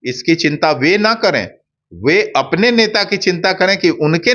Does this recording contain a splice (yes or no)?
no